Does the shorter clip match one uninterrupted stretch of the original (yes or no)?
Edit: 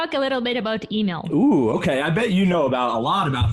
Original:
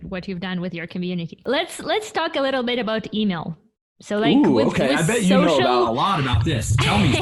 no